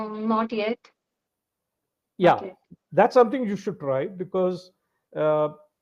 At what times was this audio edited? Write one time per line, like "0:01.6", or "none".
none

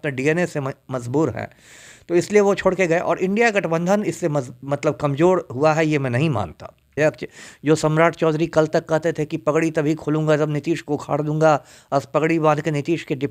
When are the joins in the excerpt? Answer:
0:06.9

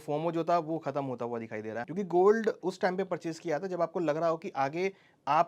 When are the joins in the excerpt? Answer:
0:01.8

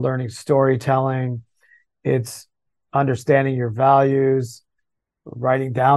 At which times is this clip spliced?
none

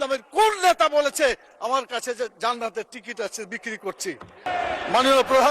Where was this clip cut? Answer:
0:04.5

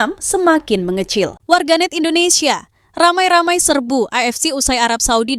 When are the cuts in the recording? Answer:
0:01.4

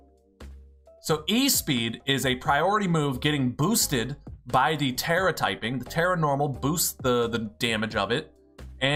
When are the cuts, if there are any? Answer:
none

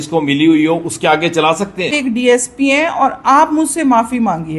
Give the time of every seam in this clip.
0:01.9

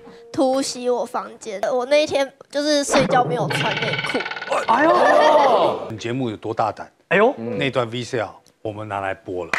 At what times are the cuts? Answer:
0:01.7
0:05.9

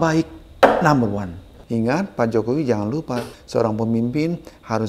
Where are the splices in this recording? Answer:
0:01.5
0:03.3

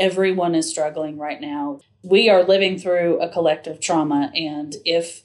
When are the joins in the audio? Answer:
0:01.8

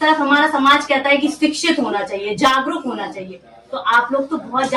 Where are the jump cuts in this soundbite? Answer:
none

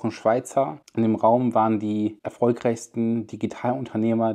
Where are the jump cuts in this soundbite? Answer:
0:00.9
0:02.2

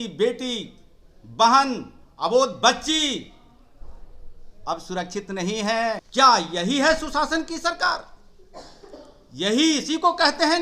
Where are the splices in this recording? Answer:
0:06.1

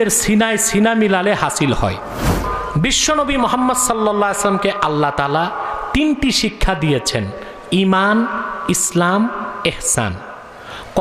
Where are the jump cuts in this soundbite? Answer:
0:02.4

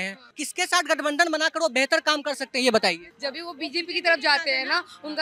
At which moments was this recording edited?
none

